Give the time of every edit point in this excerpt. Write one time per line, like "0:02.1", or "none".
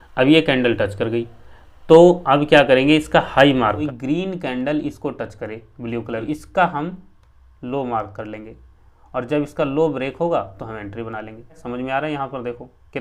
0:03.8
0:06.2
0:11.6